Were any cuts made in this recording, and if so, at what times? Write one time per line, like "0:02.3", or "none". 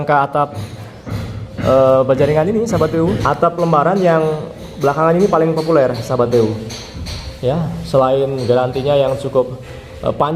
0:03.2